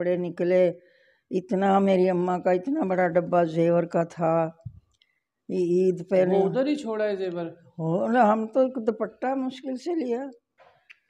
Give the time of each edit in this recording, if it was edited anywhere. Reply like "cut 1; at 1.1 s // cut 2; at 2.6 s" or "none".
none